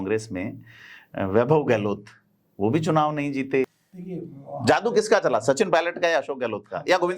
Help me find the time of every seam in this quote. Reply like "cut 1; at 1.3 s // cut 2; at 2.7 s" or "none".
cut 1; at 3.8 s

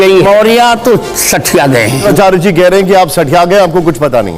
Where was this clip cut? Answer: cut 1; at 2.1 s

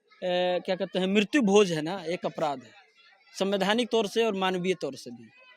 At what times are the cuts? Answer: none

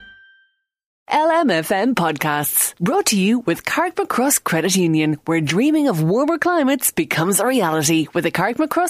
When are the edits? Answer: cut 1; at 1.0 s

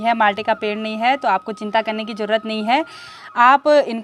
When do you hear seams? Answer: none

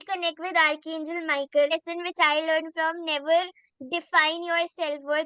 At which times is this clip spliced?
cut 1; at 1.7 s

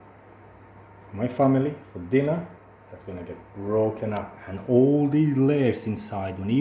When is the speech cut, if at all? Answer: none

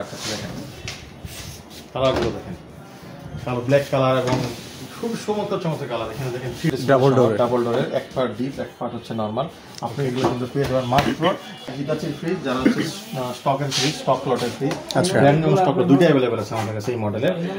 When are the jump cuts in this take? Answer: cut 1; at 6.7 s // cut 2; at 11.7 s

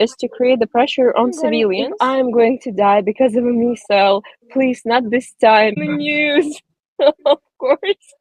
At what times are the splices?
cut 1; at 1.8 s // cut 2; at 5.8 s

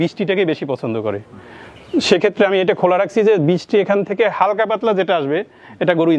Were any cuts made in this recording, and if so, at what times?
none

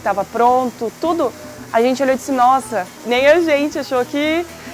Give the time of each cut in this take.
cut 1; at 3.0 s

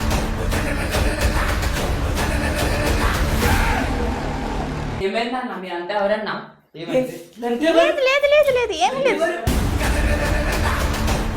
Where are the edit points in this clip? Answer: cut 1; at 9.5 s

